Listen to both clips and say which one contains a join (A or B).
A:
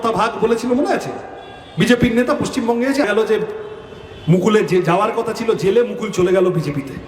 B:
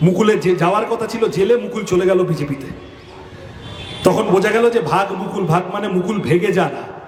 A